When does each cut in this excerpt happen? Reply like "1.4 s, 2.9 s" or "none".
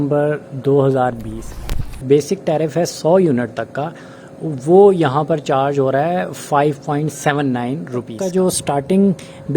2.0 s, 8.6 s